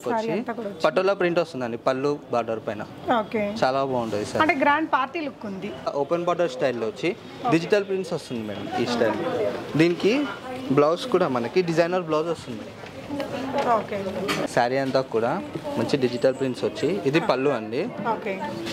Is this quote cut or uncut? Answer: cut